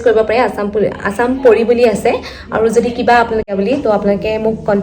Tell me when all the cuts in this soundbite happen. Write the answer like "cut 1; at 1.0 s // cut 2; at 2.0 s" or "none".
cut 1; at 3.4 s